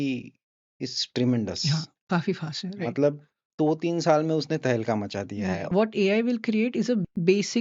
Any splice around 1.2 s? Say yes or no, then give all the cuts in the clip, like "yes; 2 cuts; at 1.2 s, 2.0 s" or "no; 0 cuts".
no; 1 cut; at 5.7 s